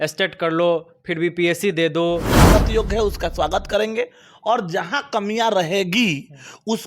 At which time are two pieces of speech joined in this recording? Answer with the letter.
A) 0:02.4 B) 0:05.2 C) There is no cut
A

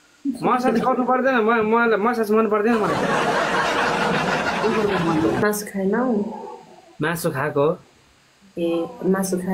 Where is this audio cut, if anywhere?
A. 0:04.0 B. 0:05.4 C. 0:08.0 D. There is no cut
B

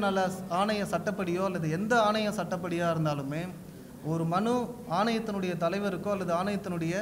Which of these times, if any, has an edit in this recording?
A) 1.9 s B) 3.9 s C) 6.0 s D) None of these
D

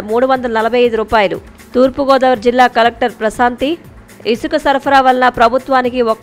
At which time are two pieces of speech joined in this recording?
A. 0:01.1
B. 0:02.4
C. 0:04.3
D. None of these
D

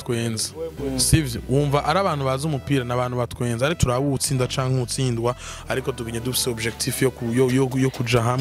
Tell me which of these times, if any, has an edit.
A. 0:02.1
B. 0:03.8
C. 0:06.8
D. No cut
B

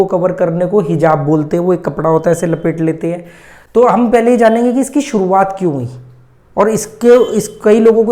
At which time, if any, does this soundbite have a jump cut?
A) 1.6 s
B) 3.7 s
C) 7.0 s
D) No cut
D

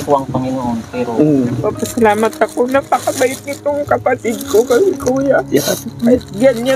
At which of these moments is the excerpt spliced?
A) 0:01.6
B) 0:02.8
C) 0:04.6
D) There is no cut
A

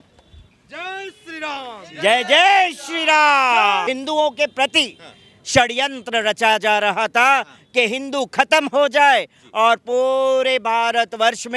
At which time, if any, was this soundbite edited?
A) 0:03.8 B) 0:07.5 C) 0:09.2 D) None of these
A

